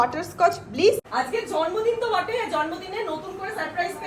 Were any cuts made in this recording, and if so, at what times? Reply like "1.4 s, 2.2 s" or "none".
1.1 s